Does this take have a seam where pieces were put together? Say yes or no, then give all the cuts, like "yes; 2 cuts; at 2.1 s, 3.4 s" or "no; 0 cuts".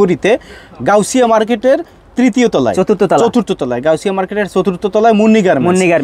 no; 0 cuts